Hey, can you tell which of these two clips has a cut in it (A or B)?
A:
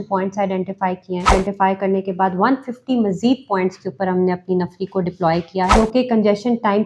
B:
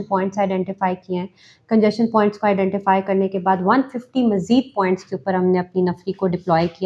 A